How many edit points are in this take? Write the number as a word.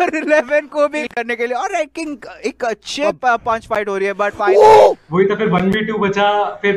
two